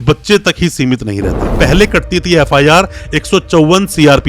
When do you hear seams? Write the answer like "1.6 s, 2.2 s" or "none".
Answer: 1.6 s